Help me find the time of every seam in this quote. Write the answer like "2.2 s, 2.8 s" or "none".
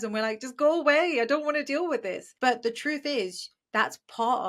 2.3 s